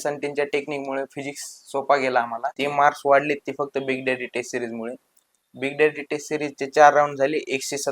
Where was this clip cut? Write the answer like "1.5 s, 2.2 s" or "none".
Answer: 2.6 s